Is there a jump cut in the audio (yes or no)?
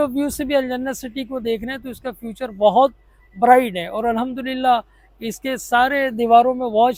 no